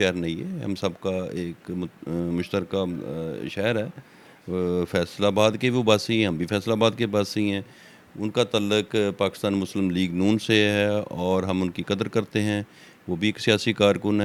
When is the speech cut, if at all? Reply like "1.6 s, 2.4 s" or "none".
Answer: none